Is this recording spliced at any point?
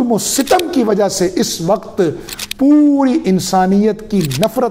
no; 0 cuts

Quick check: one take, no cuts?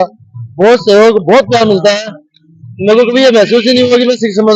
yes; 0 cuts

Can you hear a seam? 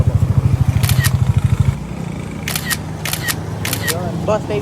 yes; 1 cut; at 1.8 s

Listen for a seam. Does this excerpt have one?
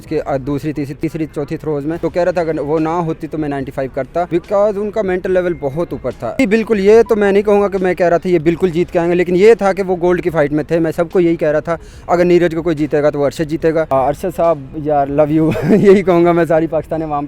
yes; 5 cuts; at 1.0 s, 2.0 s, 4.3 s, 6.4 s, 13.9 s

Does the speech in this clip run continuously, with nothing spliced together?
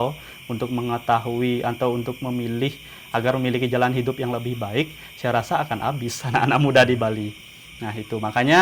yes; 0 cuts

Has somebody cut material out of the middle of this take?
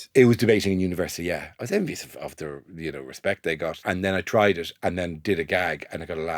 yes; 2 cuts; at 1.5 s, 3.8 s

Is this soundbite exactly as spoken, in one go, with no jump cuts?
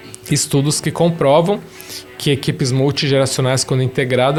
yes; 0 cuts

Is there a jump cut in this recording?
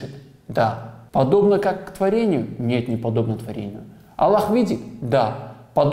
yes; 1 cut; at 0.9 s

